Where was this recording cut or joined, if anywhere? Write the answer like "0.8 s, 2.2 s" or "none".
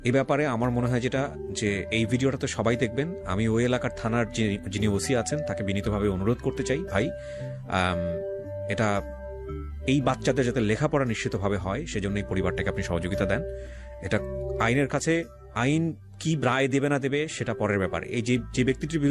none

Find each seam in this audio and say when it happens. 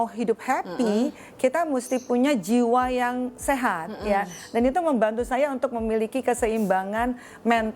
none

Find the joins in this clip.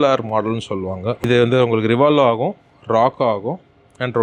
1.2 s

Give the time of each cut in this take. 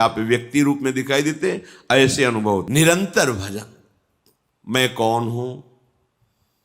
2.7 s

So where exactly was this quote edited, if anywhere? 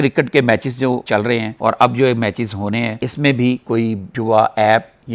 none

